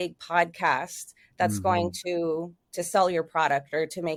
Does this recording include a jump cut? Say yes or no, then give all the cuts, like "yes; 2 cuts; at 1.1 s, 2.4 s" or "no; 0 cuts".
no; 0 cuts